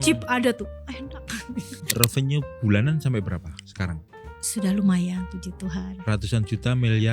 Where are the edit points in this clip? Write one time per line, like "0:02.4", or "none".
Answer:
0:01.8